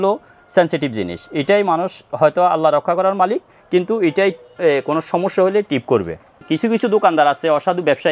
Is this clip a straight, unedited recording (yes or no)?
no